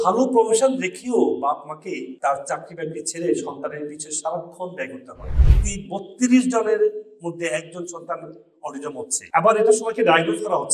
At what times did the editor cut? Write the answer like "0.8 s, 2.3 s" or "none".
5.3 s

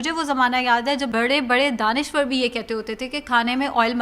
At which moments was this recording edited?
1.1 s

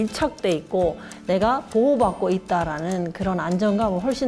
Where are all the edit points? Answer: 1.1 s

